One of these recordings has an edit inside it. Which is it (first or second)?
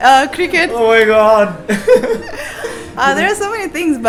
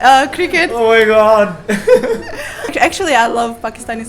second